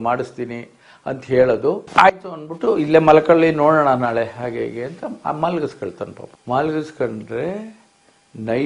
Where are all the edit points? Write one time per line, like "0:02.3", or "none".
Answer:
0:01.8